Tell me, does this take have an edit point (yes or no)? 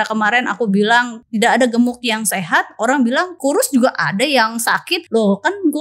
yes